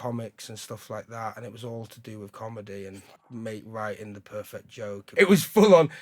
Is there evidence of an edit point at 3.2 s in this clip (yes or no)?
no